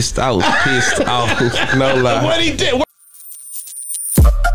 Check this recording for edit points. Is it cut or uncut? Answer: cut